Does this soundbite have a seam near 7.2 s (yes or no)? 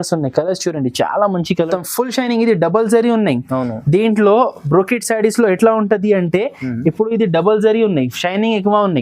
no